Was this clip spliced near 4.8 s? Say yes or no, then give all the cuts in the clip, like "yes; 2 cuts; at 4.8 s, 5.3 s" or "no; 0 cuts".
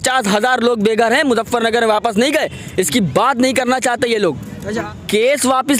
yes; 1 cut; at 4.8 s